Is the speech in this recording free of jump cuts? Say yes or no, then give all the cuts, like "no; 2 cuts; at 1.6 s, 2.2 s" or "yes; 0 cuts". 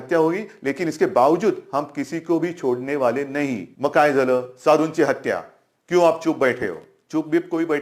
no; 1 cut; at 3.7 s